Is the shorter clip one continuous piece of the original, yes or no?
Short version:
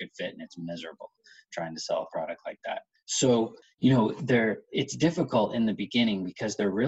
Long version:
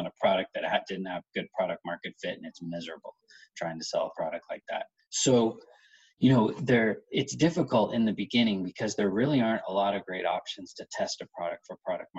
no